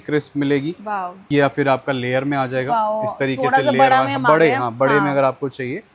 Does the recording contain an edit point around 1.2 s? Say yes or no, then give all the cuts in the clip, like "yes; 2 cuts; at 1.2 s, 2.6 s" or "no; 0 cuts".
yes; 1 cut; at 1.2 s